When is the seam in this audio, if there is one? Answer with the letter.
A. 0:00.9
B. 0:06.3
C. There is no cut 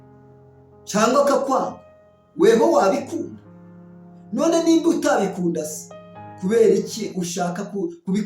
A